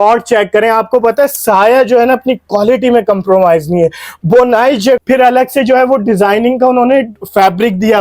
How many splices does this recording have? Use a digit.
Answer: 1